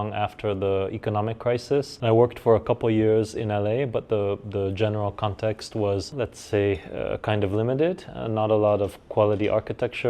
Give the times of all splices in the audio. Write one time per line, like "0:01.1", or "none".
0:01.9
0:06.1